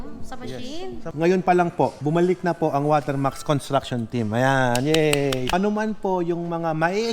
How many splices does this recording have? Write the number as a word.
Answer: two